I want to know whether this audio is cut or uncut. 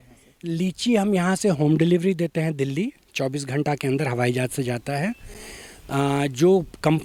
uncut